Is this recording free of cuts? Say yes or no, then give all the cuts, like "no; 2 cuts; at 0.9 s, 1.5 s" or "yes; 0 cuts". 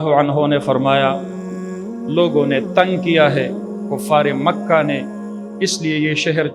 yes; 0 cuts